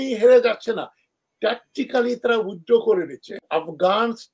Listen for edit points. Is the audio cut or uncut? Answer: cut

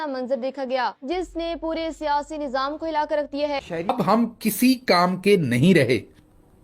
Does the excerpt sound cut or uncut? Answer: cut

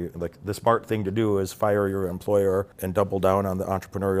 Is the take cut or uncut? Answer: cut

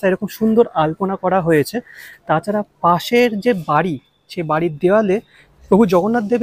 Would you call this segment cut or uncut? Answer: uncut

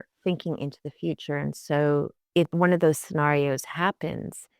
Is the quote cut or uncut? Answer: cut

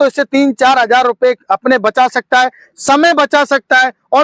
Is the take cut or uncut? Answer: uncut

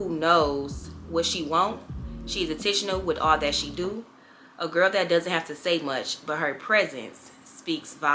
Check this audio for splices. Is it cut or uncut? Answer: uncut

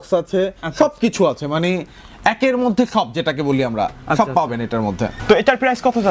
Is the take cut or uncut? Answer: uncut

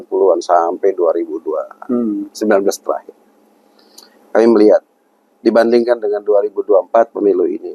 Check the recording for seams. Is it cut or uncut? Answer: uncut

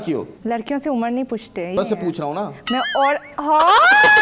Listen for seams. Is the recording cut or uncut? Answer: cut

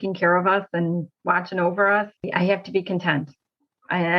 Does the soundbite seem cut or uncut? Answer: cut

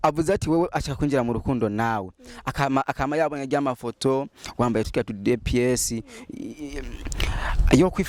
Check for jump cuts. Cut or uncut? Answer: uncut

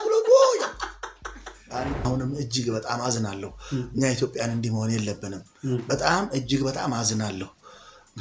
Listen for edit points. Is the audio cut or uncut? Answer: cut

